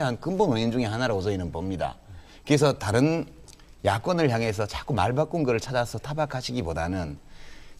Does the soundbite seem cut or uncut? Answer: cut